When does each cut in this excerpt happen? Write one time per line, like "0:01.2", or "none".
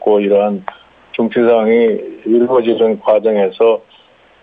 0:01.1